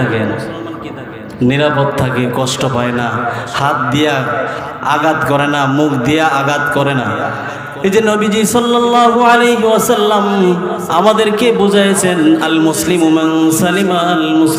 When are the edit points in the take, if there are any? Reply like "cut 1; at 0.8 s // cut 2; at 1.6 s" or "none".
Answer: none